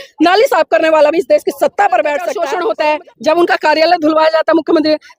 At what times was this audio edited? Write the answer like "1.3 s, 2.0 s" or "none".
2.4 s